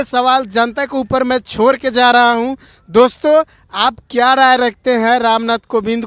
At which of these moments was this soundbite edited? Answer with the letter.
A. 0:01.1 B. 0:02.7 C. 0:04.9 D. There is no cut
D